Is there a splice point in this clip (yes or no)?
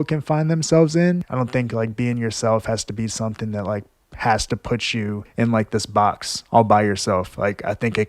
yes